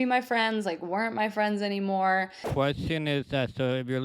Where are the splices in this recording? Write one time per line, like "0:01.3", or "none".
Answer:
0:02.5